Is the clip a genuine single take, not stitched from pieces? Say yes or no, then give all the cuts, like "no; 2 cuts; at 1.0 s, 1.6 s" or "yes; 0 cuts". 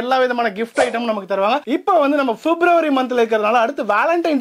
no; 1 cut; at 1.6 s